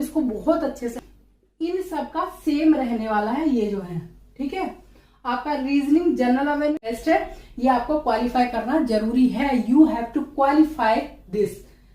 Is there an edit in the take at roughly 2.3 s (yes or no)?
no